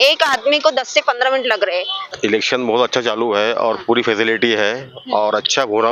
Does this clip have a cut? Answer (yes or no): yes